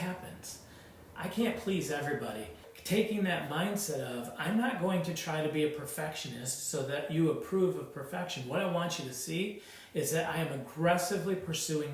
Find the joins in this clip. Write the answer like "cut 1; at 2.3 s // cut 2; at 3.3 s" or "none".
cut 1; at 2.7 s